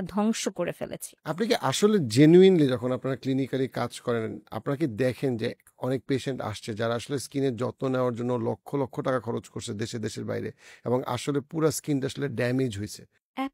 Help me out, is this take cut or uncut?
uncut